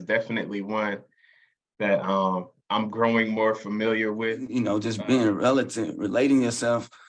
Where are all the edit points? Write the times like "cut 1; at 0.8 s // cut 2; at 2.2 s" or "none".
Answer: cut 1; at 4.6 s